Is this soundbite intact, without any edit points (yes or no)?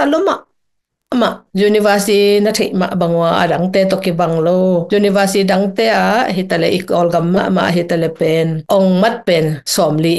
yes